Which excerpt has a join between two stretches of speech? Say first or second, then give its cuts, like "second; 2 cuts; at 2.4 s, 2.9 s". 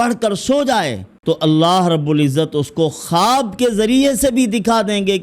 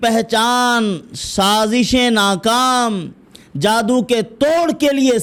first; 1 cut; at 1.1 s